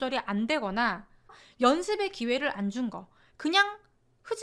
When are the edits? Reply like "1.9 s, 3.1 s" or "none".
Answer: 1.4 s

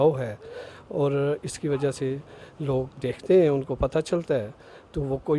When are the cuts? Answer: 2.9 s

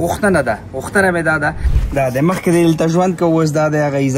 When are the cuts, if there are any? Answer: 1.7 s

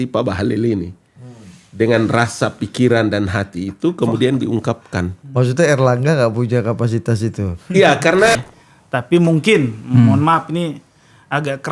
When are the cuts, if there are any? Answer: 8.4 s

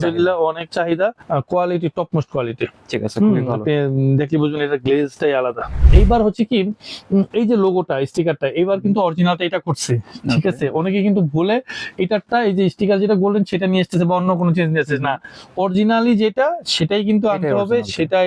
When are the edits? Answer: 1.2 s, 5.7 s

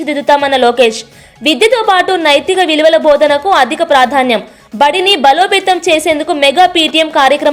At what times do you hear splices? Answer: none

